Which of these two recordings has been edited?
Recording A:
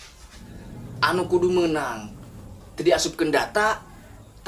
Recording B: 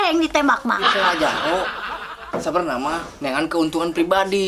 B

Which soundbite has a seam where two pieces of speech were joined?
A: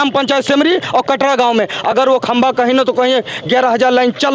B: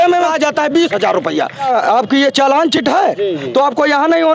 B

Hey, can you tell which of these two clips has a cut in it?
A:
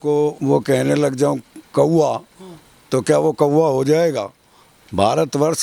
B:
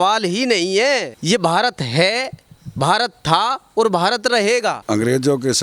B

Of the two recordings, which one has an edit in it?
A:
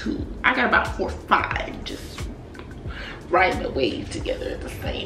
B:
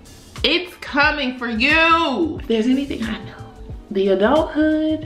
B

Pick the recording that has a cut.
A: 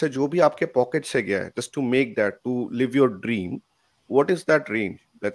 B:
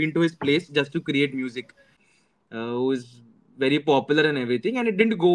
B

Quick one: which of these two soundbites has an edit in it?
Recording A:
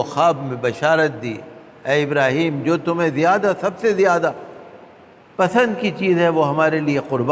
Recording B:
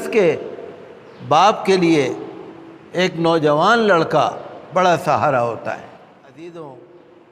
B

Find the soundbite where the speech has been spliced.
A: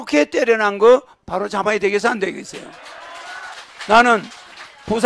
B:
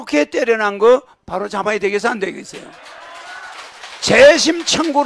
B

